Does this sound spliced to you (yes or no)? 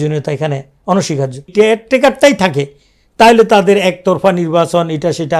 yes